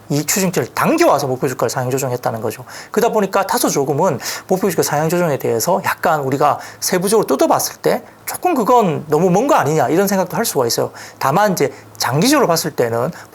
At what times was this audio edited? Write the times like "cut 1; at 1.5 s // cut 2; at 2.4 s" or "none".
none